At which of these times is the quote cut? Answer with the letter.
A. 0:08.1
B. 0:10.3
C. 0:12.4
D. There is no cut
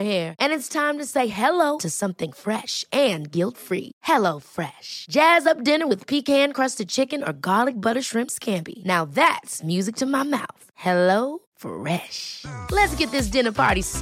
D